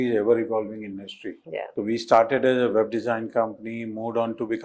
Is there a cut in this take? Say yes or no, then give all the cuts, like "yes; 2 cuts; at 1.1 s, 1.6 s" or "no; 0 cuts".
no; 0 cuts